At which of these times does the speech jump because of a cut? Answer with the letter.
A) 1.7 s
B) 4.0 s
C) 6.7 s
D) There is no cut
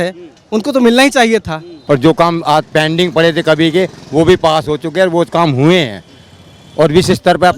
A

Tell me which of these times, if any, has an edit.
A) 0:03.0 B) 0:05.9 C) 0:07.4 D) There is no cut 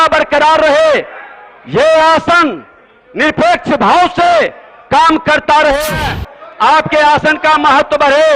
B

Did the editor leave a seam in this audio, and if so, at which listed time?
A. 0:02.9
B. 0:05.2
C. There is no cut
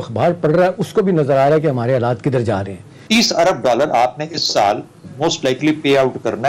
A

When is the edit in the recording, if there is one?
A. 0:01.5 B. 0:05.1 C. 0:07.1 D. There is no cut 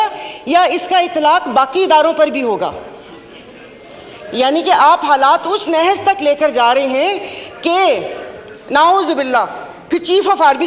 D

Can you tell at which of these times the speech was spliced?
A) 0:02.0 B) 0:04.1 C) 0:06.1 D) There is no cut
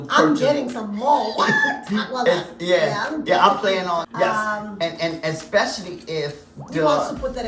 B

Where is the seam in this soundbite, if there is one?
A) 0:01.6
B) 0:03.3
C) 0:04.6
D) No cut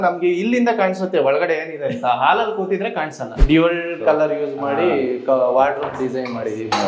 B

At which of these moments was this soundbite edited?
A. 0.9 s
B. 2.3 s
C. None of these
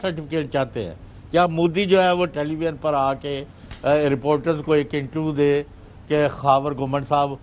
B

